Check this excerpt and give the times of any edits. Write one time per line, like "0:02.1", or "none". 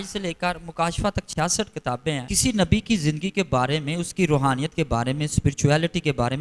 0:02.3

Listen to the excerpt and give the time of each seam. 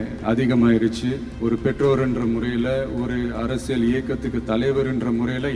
0:01.3

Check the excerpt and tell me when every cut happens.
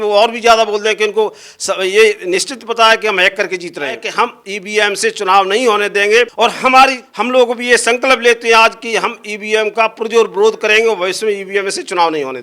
0:04.0
0:06.3
0:07.1

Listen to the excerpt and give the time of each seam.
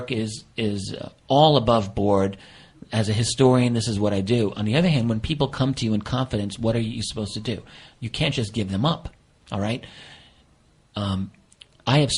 none

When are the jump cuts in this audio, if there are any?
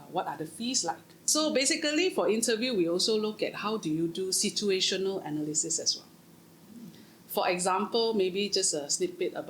0:01.2

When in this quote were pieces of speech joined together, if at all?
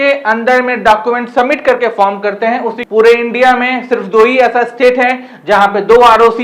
0:02.8

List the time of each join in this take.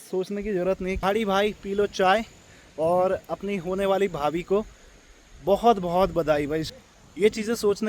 0:01.0
0:06.7

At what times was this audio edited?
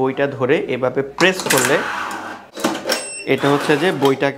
0:02.4

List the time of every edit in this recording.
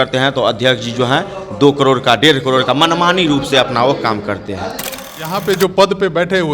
0:05.0

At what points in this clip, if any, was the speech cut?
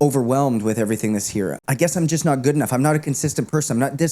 0:01.6

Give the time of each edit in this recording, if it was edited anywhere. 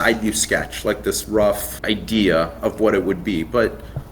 0:01.7

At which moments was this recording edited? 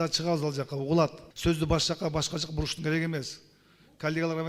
0:01.3

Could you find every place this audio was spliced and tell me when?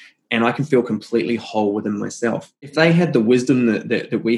0:02.7

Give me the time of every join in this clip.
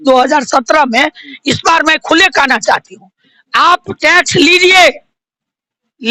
none

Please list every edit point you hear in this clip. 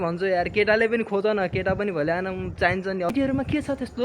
0:03.1

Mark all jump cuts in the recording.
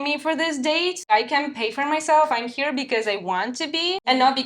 0:01.1

